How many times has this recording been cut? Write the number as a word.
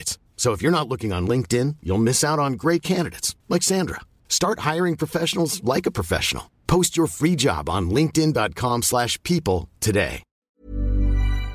one